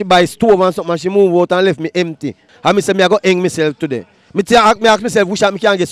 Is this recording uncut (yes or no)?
no